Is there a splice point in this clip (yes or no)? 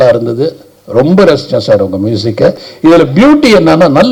yes